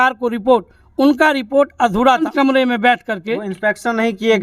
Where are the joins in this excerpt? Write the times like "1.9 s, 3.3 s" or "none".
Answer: 2.3 s